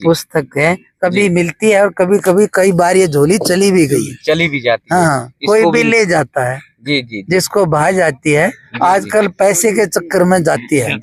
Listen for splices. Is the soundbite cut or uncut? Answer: uncut